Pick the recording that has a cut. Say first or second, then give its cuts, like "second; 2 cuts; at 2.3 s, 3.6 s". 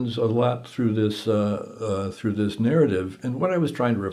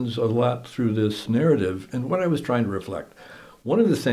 second; 1 cut; at 1.2 s